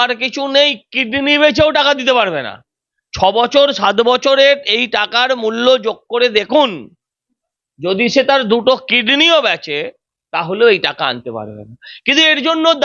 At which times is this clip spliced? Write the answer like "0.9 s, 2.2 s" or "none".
none